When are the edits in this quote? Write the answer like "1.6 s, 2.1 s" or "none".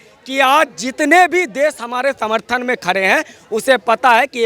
none